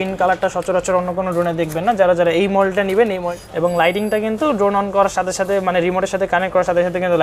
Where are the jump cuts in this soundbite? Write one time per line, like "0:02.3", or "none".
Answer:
0:03.3